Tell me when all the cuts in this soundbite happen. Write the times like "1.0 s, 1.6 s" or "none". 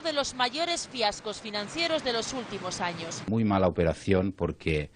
none